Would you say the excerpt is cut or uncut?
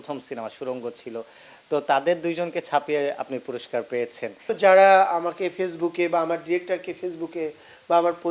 cut